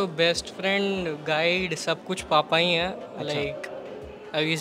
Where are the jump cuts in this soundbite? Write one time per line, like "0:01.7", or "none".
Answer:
none